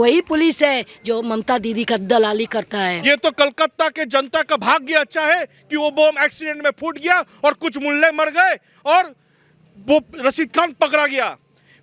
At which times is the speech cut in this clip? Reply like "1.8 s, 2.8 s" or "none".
3.0 s